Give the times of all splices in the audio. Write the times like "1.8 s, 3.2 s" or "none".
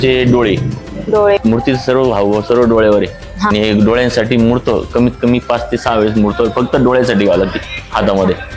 1.4 s, 3.5 s